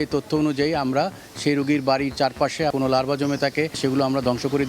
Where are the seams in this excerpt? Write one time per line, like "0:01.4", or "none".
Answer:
0:02.7
0:03.8